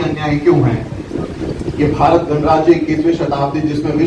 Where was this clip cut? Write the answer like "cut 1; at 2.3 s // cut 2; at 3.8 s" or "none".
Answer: cut 1; at 1.0 s